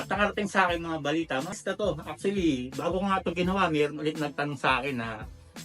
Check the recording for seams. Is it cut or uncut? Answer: cut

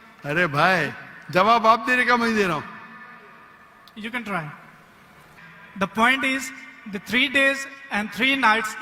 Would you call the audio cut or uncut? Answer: cut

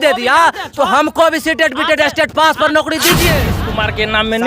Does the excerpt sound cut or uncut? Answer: cut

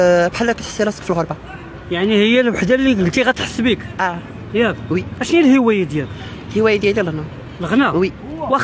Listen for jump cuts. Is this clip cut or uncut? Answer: uncut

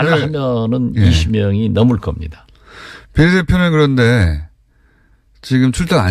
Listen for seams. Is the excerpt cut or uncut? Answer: uncut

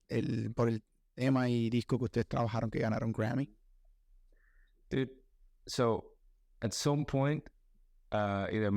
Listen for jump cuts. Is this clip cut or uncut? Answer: uncut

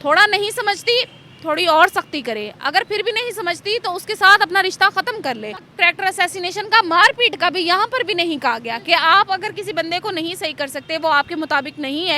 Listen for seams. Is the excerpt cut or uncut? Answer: cut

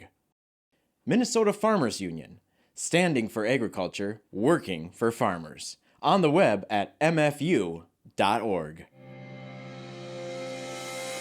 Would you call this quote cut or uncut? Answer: cut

